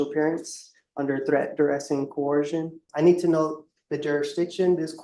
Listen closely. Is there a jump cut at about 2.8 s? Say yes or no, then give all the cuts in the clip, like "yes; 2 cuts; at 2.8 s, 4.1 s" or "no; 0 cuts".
yes; 1 cut; at 2.8 s